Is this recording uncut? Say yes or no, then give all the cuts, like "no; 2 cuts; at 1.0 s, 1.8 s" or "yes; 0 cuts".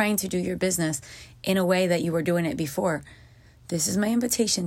yes; 0 cuts